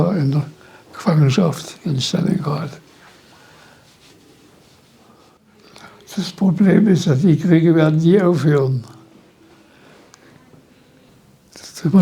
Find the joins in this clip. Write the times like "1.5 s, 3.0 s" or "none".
5.4 s, 11.1 s